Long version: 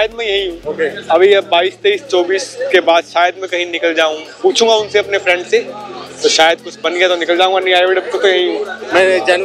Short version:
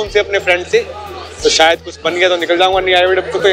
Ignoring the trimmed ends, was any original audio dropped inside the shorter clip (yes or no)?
no